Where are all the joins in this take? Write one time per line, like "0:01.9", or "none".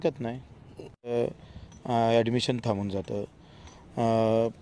0:01.1